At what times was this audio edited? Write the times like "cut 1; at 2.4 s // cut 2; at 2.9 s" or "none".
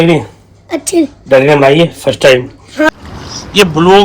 cut 1; at 2.9 s